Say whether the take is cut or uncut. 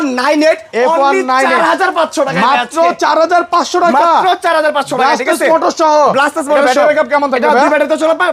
uncut